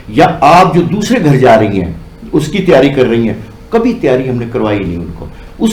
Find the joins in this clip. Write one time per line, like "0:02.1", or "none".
none